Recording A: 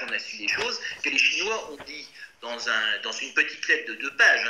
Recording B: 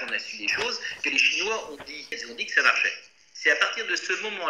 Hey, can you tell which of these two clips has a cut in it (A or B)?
B